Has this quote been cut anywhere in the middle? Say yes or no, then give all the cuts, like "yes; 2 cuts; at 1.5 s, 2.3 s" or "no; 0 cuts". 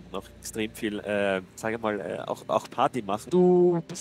yes; 2 cuts; at 1.5 s, 3.3 s